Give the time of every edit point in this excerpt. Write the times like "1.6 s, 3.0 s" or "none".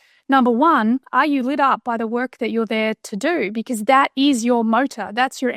none